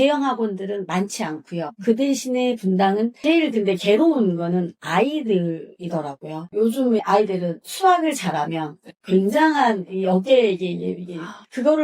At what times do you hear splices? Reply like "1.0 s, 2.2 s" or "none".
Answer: 3.2 s

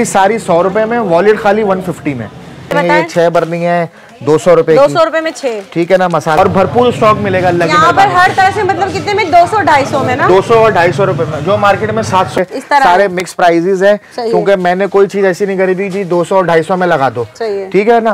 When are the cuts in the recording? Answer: 2.7 s, 6.4 s, 12.4 s

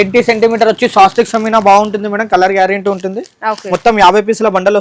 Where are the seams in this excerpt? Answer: none

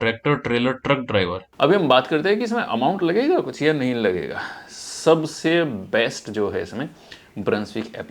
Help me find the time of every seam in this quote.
1.4 s

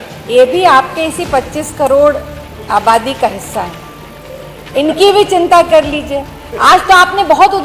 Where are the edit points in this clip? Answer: none

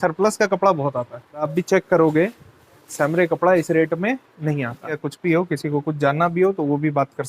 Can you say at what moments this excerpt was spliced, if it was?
1.5 s, 5.0 s

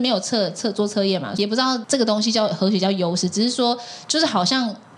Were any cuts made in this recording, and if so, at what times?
1.4 s

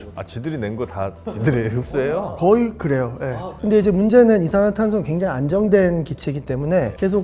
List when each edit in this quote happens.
3.6 s

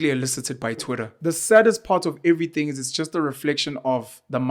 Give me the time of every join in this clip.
1.1 s

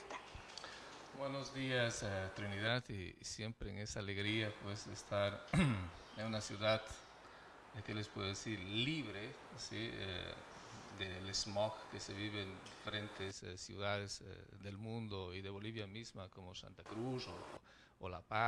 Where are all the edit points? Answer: none

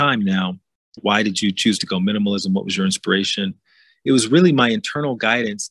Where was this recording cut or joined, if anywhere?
1.0 s

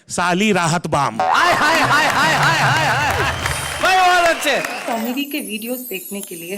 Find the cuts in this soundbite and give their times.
4.8 s

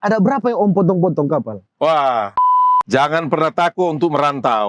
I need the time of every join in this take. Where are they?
2.4 s

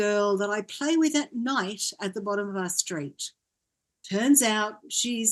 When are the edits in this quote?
none

